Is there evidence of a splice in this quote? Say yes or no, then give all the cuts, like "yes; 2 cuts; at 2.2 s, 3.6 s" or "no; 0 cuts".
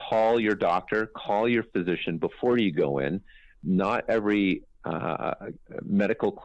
yes; 1 cut; at 3.6 s